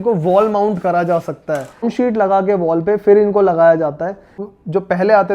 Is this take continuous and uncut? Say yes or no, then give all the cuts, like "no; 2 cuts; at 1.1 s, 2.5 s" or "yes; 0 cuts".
no; 2 cuts; at 1.8 s, 4.5 s